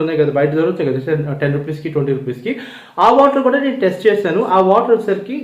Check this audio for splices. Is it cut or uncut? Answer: uncut